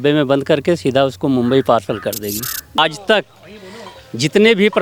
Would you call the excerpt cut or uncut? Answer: cut